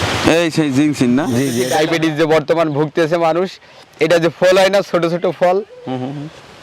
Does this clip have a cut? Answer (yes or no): yes